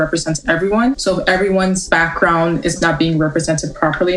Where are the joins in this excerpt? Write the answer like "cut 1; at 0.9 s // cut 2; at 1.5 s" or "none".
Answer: cut 1; at 1.0 s // cut 2; at 1.8 s // cut 3; at 2.8 s